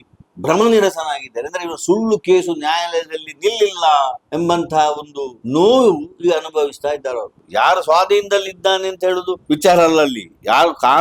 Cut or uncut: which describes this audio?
cut